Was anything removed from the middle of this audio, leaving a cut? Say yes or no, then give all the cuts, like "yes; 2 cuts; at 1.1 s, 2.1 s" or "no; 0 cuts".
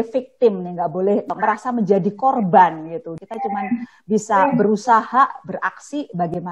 yes; 2 cuts; at 1.3 s, 3.2 s